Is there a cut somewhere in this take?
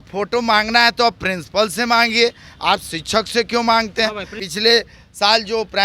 yes; 1 cut; at 4.4 s

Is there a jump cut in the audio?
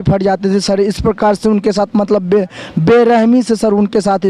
no; 0 cuts

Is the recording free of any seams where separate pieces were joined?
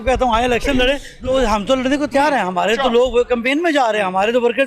no; 1 cut; at 1.2 s

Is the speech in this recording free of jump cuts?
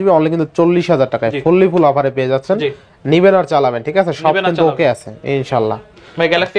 yes; 0 cuts

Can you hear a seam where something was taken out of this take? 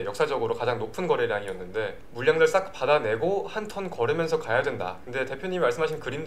no; 0 cuts

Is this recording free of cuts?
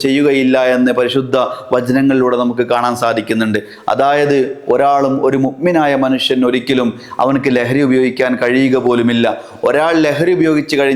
yes; 0 cuts

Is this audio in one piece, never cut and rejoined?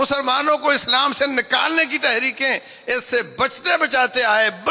yes; 0 cuts

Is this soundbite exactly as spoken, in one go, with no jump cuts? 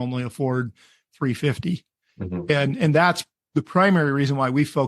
no; 1 cut; at 3.3 s

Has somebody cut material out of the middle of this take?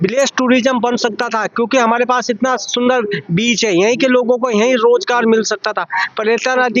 no; 0 cuts

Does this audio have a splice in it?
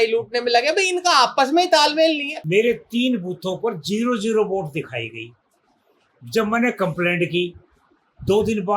yes; 1 cut; at 2.3 s

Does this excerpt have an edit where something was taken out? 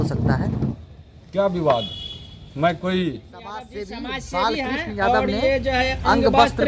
yes; 1 cut; at 3.8 s

